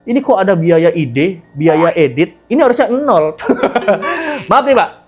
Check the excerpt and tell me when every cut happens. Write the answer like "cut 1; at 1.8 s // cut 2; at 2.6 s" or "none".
none